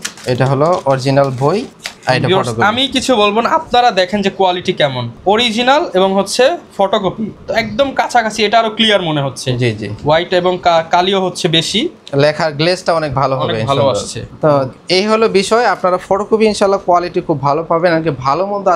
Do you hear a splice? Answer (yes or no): no